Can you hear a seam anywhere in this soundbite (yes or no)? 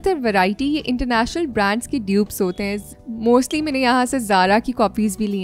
no